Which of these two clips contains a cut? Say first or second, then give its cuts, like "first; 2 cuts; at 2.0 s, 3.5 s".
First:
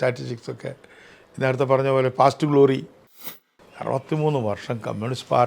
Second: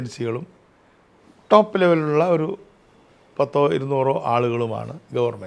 first; 1 cut; at 3.2 s